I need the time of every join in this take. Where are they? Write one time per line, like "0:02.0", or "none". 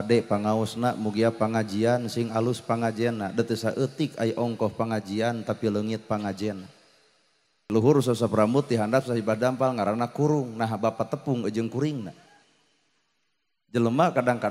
0:07.7